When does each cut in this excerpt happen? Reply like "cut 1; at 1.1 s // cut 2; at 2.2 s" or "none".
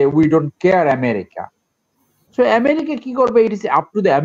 none